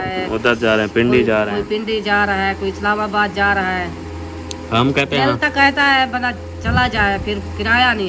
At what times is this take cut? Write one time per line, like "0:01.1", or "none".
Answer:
none